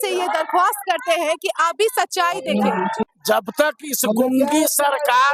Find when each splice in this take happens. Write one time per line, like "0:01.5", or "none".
0:03.1